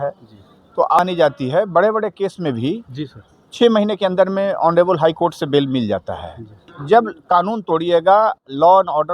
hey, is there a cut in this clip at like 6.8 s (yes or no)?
yes